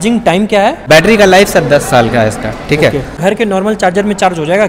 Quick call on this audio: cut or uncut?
cut